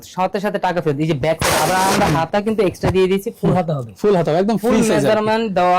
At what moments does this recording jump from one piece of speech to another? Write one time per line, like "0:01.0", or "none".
none